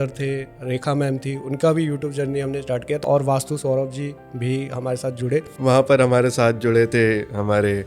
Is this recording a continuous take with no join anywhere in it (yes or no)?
no